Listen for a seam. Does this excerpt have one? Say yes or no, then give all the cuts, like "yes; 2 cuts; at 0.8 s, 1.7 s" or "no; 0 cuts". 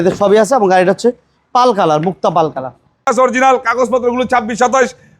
yes; 1 cut; at 3.1 s